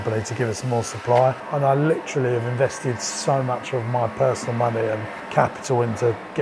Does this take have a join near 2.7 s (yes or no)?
no